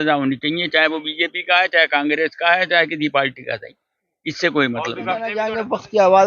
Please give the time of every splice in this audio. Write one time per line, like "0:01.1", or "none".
0:05.3